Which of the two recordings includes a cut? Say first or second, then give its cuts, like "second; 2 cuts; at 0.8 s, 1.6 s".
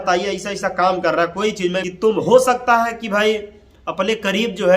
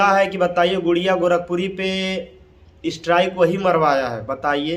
first; 1 cut; at 1.8 s